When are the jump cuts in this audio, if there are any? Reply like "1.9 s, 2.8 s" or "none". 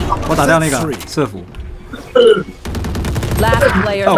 1.5 s